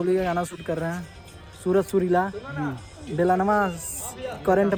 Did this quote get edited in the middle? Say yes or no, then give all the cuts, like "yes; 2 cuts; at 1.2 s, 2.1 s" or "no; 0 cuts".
no; 0 cuts